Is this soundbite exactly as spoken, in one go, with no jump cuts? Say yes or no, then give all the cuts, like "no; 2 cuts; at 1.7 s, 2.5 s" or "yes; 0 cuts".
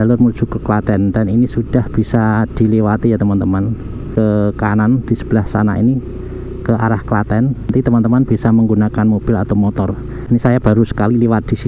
no; 3 cuts; at 4.1 s, 7.7 s, 10.1 s